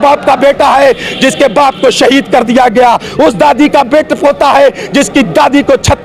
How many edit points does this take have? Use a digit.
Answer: 0